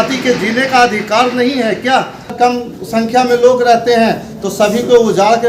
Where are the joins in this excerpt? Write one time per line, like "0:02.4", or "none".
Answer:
0:02.3

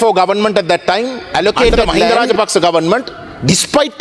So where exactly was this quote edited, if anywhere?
0:02.1

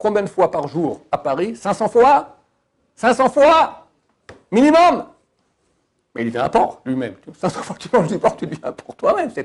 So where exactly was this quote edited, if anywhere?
none

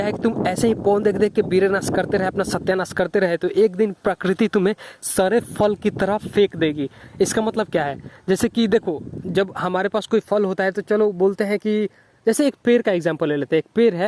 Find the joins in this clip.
none

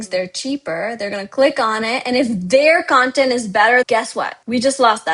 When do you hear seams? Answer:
0:03.9

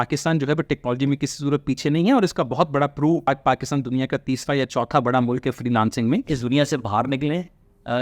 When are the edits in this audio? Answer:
0:03.3
0:06.3

